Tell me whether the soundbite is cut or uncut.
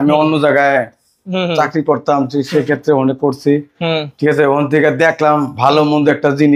uncut